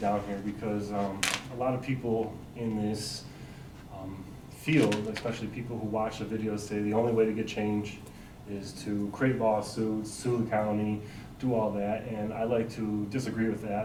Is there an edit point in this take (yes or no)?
no